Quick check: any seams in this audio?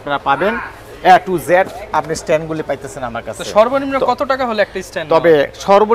no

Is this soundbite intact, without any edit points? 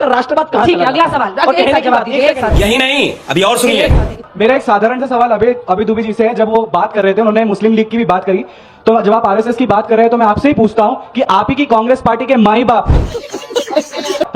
yes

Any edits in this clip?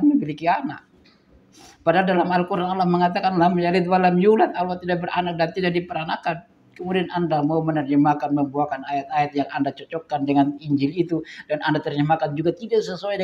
no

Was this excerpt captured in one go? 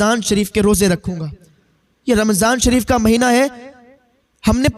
yes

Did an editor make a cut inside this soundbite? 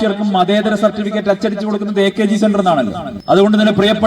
yes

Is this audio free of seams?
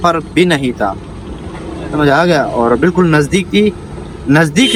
yes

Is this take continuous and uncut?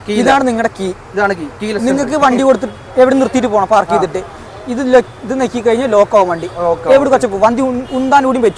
yes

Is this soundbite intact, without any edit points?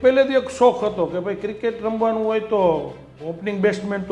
yes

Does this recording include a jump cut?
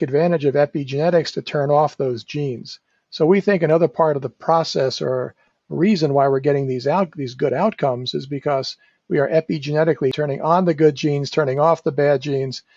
yes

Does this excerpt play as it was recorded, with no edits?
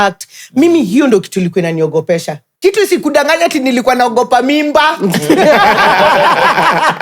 no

